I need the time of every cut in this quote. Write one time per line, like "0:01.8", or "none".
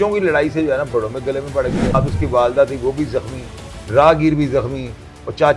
0:01.9